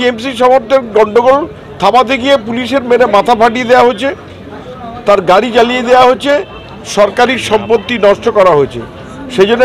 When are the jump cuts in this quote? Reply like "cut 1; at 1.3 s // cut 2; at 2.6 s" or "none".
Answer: none